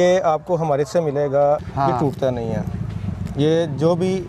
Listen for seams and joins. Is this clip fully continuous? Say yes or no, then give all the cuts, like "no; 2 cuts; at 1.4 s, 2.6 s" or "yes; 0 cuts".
no; 1 cut; at 1.7 s